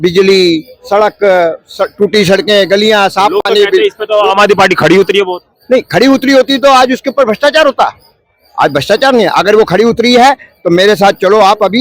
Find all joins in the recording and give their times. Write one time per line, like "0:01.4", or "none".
none